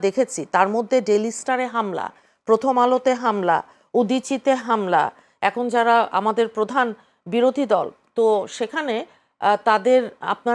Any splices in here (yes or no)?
yes